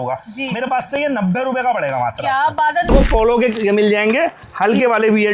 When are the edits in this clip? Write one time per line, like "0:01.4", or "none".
0:02.9